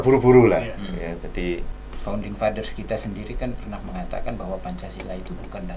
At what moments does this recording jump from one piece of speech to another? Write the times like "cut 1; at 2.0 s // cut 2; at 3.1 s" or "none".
cut 1; at 1.8 s